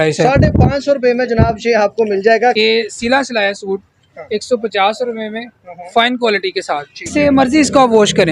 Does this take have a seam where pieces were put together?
yes; 2 cuts; at 2.6 s, 7.1 s

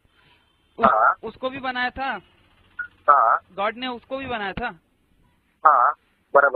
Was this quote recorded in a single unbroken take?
yes; 0 cuts

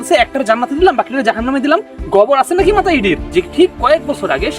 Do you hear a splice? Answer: yes; 1 cut; at 3.2 s

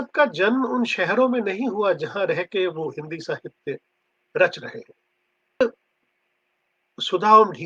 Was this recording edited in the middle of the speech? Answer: yes; 1 cut; at 5.6 s

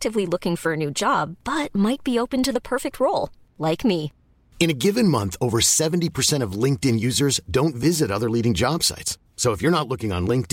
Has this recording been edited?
no; 0 cuts

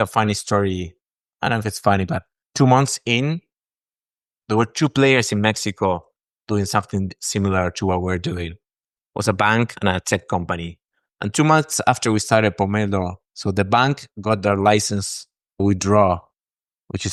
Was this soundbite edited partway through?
no; 0 cuts

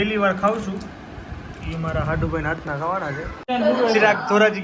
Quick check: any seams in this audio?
yes; 1 cut; at 3.5 s

